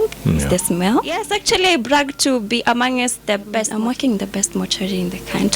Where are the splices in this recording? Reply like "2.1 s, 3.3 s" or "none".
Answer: 1.3 s, 3.7 s